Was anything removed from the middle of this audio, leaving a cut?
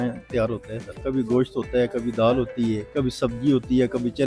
yes; 2 cuts; at 1.0 s, 2.8 s

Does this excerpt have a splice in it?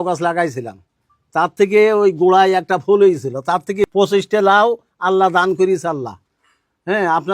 yes; 1 cut; at 3.9 s

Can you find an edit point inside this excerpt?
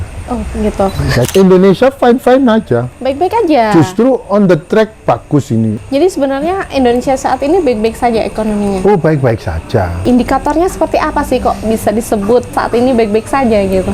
yes; 3 cuts; at 1.3 s, 5.8 s, 12.5 s

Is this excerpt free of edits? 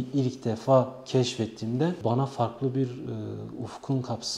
yes; 0 cuts

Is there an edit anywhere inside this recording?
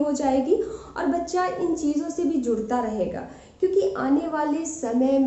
no; 0 cuts

